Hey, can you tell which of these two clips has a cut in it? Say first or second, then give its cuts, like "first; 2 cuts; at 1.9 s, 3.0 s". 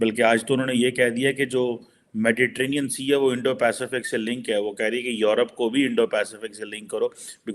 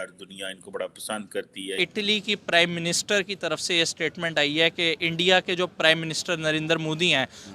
second; 1 cut; at 1.8 s